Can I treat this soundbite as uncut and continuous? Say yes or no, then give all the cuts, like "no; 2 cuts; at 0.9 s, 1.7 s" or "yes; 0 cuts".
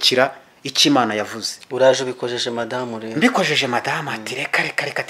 yes; 0 cuts